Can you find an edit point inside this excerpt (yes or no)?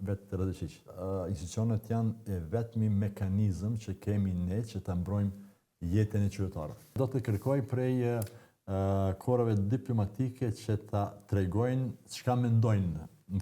yes